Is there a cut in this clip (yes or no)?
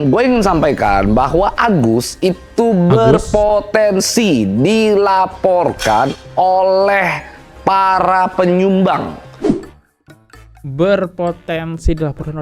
no